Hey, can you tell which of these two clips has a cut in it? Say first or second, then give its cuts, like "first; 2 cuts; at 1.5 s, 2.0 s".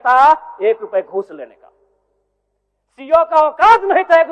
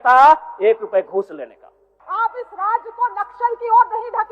second; 1 cut; at 2.0 s